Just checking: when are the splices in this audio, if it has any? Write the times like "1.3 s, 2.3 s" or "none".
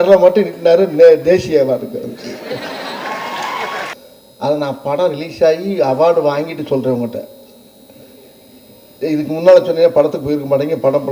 3.9 s